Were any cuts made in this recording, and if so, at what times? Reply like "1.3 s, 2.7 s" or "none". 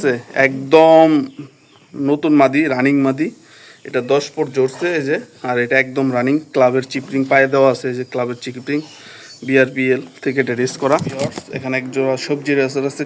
11.1 s